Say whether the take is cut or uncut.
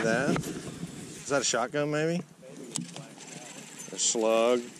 uncut